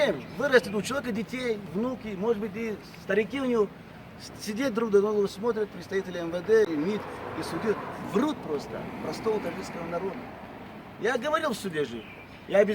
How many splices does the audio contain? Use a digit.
1